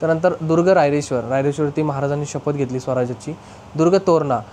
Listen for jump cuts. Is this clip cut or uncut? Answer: uncut